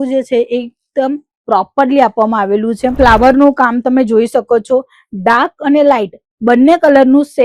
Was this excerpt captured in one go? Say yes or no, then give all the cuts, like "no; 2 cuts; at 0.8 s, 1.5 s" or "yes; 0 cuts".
no; 1 cut; at 2.9 s